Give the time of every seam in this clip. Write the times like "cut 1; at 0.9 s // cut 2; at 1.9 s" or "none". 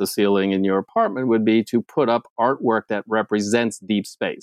none